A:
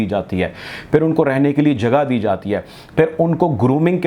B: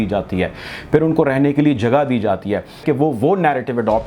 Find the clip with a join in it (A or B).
B